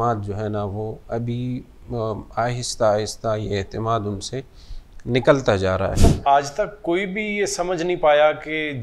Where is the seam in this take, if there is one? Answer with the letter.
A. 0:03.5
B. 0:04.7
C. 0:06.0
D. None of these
C